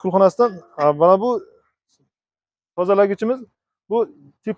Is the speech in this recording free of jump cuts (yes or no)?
yes